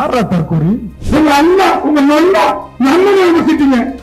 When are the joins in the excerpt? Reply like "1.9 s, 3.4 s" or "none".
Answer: 0.9 s, 2.7 s